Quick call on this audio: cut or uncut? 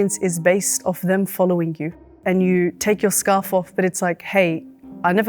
cut